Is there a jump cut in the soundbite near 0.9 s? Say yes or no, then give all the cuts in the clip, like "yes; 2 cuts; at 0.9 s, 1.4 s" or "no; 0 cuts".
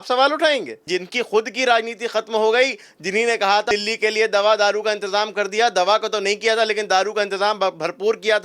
yes; 2 cuts; at 0.9 s, 3.7 s